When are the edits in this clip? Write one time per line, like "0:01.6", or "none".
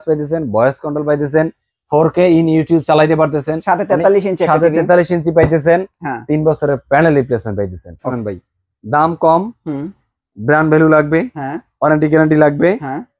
0:08.1